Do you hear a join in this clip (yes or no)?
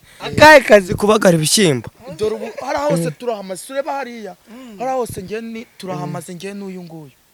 no